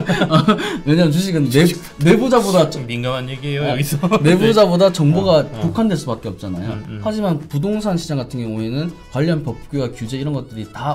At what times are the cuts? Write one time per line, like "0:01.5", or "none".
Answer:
none